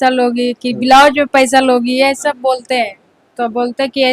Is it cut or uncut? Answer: uncut